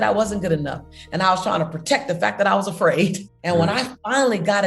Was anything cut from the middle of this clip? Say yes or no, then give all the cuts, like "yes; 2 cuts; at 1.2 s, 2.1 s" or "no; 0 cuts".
yes; 1 cut; at 3.3 s